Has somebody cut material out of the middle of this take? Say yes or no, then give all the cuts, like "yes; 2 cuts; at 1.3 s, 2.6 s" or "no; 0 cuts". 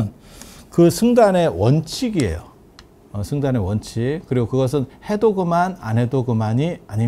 no; 0 cuts